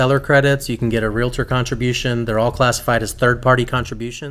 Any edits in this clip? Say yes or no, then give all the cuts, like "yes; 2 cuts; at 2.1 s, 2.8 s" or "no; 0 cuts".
no; 0 cuts